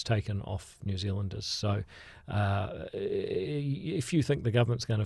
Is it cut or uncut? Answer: uncut